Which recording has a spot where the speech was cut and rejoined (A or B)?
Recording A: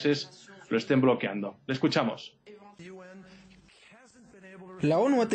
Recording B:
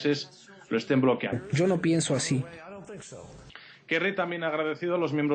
A